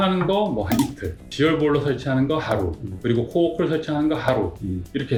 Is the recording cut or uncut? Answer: uncut